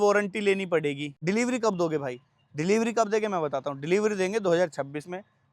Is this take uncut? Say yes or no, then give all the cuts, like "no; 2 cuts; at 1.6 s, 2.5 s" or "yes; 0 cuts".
no; 1 cut; at 1.1 s